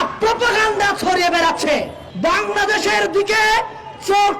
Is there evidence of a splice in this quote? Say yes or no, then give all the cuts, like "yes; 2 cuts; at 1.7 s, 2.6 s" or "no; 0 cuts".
yes; 1 cut; at 2.0 s